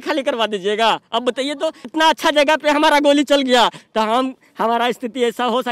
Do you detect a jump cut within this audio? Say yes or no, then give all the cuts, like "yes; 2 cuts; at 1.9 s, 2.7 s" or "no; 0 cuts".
yes; 1 cut; at 1.9 s